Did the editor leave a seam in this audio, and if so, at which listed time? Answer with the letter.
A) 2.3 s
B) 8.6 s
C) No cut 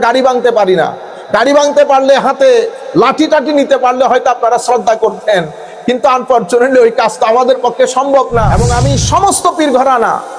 B